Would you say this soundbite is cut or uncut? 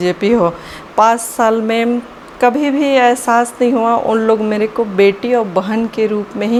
uncut